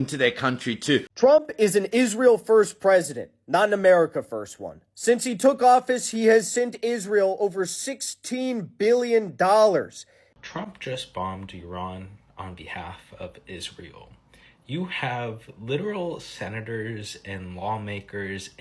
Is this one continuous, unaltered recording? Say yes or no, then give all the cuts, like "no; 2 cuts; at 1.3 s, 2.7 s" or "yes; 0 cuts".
no; 2 cuts; at 1.1 s, 10.4 s